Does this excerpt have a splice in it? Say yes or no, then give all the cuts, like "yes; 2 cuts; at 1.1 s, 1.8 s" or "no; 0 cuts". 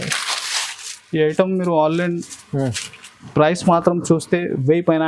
no; 0 cuts